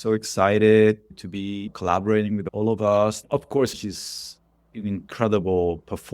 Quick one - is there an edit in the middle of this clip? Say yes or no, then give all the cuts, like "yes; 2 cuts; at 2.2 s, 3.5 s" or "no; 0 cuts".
yes; 3 cuts; at 1.7 s, 2.4 s, 3.2 s